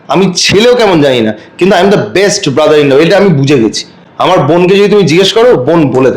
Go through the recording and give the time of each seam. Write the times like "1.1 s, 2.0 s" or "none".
none